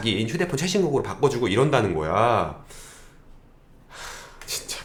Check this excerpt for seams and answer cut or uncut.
uncut